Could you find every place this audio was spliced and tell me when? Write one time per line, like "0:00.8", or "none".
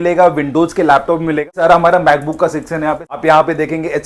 0:01.5
0:03.0